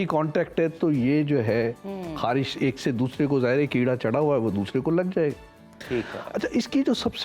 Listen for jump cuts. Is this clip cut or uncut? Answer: uncut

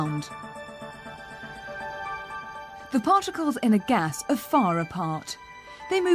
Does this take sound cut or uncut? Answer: uncut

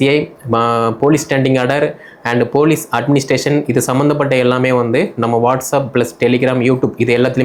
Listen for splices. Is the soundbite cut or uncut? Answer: uncut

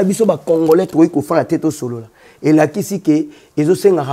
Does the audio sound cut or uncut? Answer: uncut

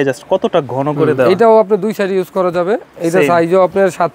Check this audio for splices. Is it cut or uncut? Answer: uncut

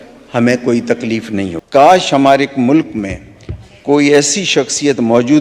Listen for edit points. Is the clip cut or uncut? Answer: cut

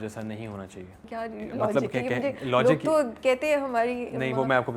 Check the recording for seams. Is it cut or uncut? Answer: cut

